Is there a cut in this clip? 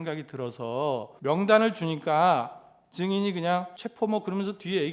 yes; 2 cuts; at 1.1 s, 3.8 s

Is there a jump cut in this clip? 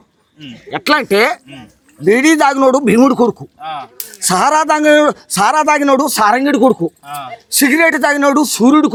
no; 0 cuts

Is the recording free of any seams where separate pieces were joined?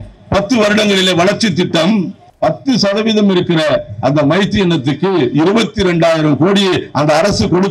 no; 1 cut; at 2.3 s

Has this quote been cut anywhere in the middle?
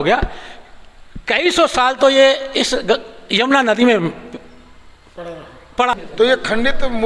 yes; 1 cut; at 5.9 s

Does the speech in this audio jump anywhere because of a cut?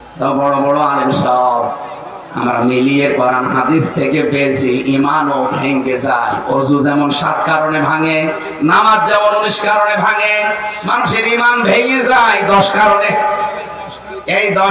no; 0 cuts

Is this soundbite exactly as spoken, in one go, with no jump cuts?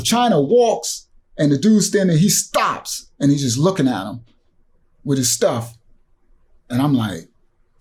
yes; 0 cuts

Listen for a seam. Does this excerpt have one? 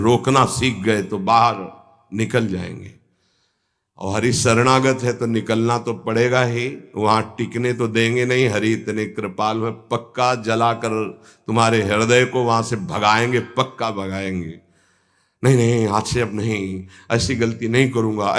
no; 0 cuts

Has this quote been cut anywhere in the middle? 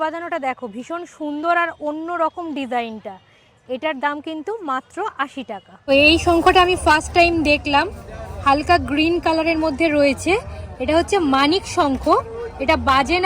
yes; 1 cut; at 5.8 s

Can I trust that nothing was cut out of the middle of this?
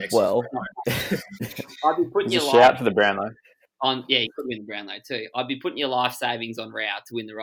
yes; 0 cuts

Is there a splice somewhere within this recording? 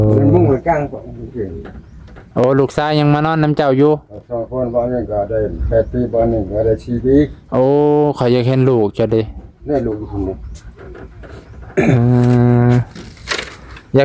no; 0 cuts

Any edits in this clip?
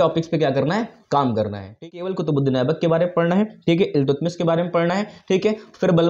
yes; 1 cut; at 1.8 s

